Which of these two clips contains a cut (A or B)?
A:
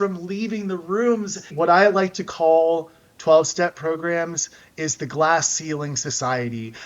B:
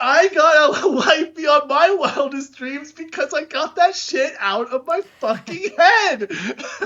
A